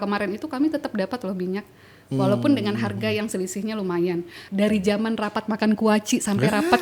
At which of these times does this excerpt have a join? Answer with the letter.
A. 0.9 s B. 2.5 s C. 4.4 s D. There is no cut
C